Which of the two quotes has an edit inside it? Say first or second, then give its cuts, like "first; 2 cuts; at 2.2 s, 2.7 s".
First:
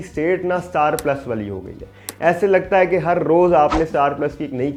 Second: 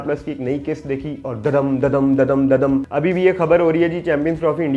second; 1 cut; at 2.9 s